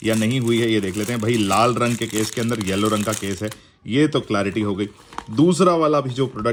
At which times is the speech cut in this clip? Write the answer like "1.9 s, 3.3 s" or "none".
none